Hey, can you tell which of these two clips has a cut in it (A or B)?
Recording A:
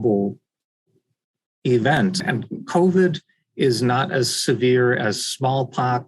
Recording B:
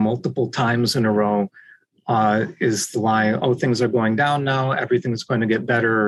A